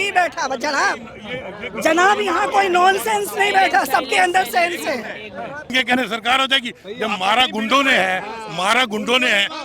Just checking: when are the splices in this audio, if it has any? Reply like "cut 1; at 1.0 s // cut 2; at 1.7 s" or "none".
cut 1; at 5.7 s